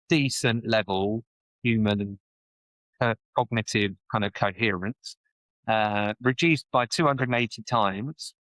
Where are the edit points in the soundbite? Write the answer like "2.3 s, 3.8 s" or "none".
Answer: none